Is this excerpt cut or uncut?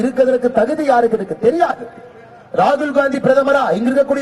uncut